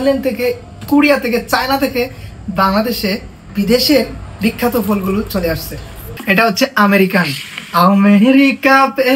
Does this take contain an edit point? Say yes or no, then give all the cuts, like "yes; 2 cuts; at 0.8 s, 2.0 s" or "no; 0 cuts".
yes; 2 cuts; at 3.4 s, 6.1 s